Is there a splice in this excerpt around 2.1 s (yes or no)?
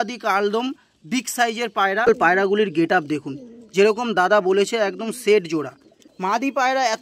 yes